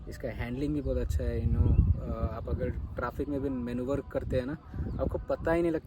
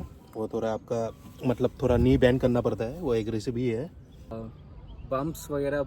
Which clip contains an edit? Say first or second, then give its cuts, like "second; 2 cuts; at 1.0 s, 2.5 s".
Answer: second; 1 cut; at 4.4 s